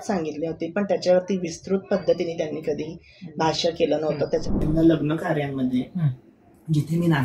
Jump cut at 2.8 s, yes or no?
no